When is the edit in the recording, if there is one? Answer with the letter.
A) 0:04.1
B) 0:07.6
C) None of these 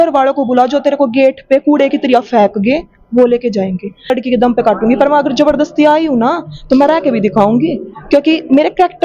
A